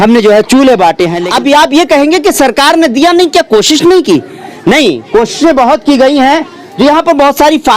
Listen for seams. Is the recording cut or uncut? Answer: cut